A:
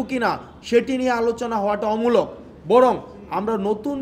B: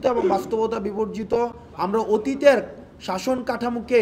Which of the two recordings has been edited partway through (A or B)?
B